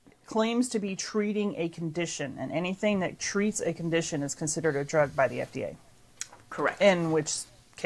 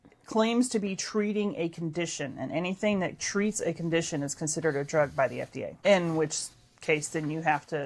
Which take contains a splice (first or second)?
second